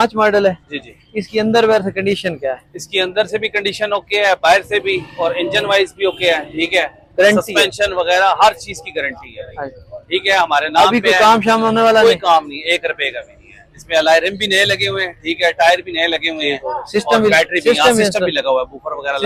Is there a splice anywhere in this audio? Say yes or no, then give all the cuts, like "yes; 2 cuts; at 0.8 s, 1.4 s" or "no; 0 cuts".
no; 0 cuts